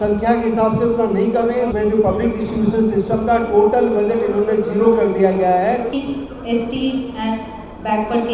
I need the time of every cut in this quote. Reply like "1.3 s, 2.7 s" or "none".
1.7 s, 5.9 s